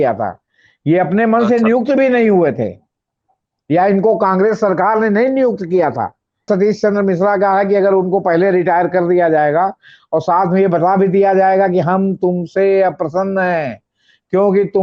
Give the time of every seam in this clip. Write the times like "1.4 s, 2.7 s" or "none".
6.5 s